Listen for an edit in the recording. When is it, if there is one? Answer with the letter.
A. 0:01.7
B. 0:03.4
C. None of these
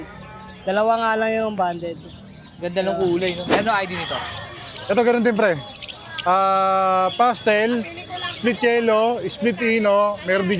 B